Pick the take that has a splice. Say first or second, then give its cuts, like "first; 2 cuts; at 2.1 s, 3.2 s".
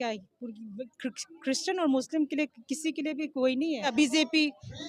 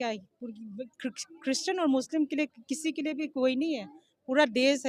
first; 1 cut; at 3.9 s